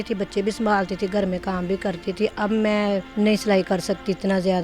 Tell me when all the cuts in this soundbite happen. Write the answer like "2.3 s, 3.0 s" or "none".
3.1 s